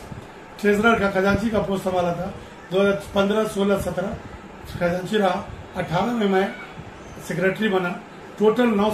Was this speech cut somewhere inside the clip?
no; 0 cuts

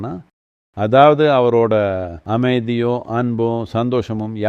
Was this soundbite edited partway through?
yes; 1 cut; at 2.1 s

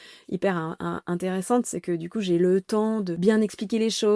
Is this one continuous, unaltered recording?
no; 1 cut; at 3.1 s

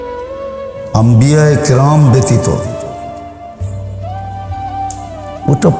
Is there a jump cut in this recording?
yes; 1 cut; at 0.9 s

